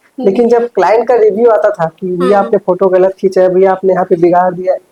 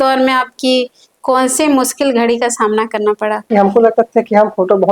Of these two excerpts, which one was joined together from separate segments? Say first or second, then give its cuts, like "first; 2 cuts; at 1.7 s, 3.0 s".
second; 1 cut; at 3.5 s